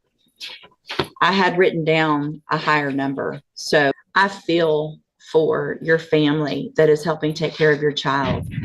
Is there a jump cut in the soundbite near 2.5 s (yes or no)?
no